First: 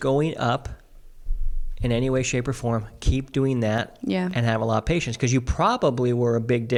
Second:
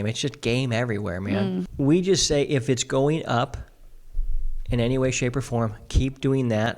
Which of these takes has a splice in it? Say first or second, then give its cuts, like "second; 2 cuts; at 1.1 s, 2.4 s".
second; 1 cut; at 1.7 s